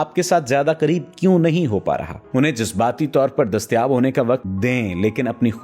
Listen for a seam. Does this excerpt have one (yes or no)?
yes